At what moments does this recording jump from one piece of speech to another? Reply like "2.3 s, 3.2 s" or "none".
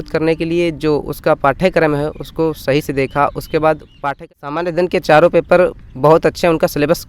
4.1 s